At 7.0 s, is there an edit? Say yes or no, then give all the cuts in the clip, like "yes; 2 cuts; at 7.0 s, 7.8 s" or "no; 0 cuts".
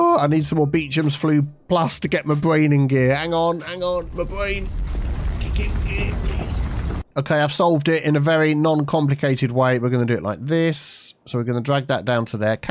no; 0 cuts